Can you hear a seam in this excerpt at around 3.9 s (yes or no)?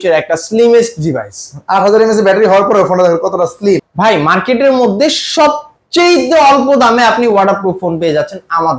yes